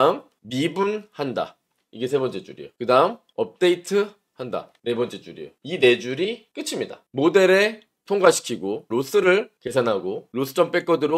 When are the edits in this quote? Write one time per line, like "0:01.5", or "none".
0:08.8
0:10.3